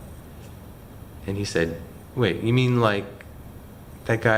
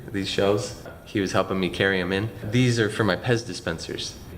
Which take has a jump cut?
second; 2 cuts; at 0.9 s, 2.4 s

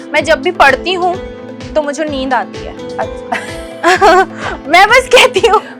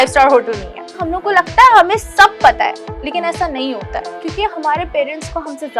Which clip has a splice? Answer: second; 2 cuts; at 1.0 s, 4.0 s

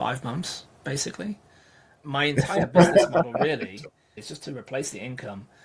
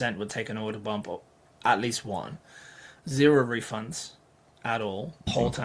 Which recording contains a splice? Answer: first; 2 cuts; at 1.9 s, 4.2 s

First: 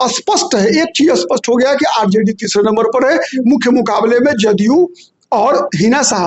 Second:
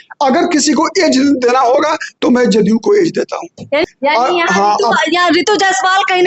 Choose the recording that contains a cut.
second; 1 cut; at 3.8 s

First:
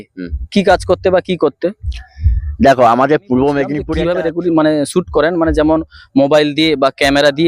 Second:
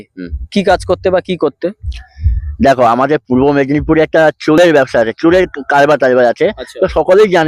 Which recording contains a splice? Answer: first; 1 cut; at 3.8 s

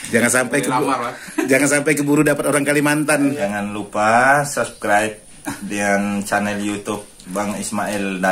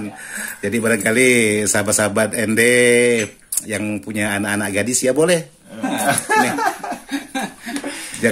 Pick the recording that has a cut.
first; 1 cut; at 3.4 s

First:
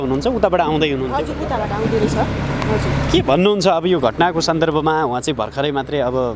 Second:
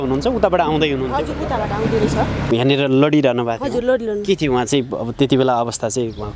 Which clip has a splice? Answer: second; 1 cut; at 2.5 s

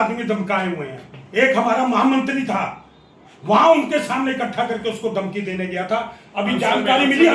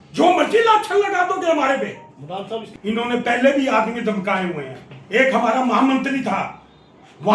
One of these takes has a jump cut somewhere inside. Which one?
second; 1 cut; at 2.7 s

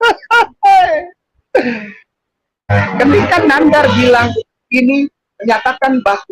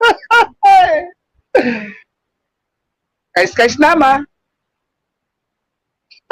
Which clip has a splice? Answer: first; 1 cut; at 2.7 s

